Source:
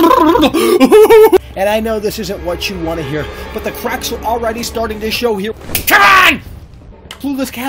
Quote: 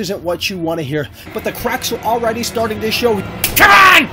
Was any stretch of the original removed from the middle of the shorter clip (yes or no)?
yes